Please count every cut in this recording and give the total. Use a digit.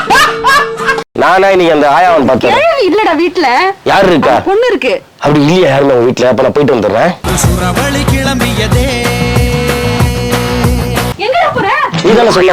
1